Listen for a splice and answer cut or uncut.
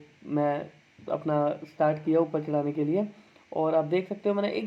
uncut